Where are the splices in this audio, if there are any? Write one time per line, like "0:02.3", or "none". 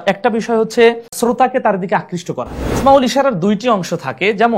0:02.6